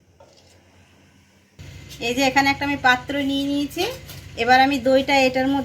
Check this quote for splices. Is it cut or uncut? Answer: cut